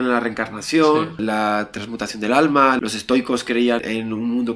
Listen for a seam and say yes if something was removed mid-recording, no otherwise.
yes